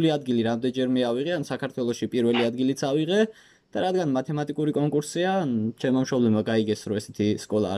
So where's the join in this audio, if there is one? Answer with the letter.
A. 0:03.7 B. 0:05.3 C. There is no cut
C